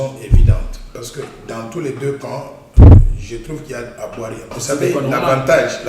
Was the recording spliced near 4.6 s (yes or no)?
yes